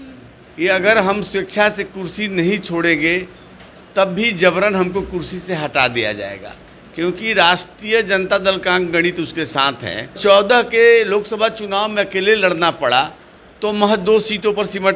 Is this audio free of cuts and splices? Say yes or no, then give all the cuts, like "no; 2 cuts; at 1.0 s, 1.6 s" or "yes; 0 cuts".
no; 1 cut; at 10.2 s